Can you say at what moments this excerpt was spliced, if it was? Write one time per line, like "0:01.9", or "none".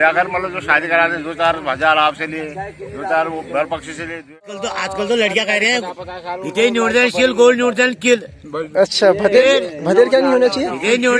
0:04.4